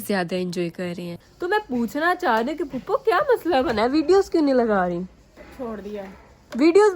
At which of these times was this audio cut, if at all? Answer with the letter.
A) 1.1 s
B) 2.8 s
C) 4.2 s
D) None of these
A